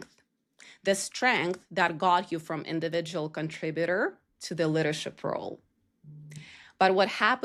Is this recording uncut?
yes; 0 cuts

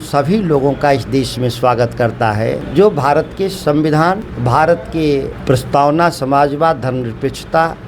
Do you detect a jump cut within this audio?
yes; 3 cuts; at 2.6 s, 4.3 s, 5.3 s

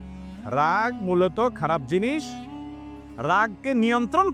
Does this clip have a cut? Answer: no; 0 cuts

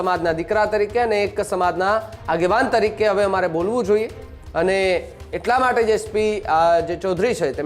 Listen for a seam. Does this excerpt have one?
no; 0 cuts

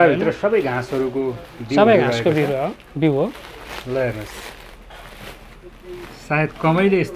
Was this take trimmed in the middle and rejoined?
no; 0 cuts

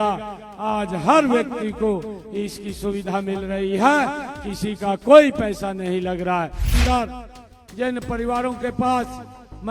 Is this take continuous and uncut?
no; 1 cut; at 6.7 s

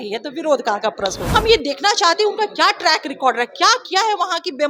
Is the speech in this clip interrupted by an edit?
yes; 1 cut; at 1.2 s

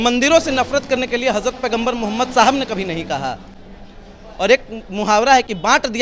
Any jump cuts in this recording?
no; 0 cuts

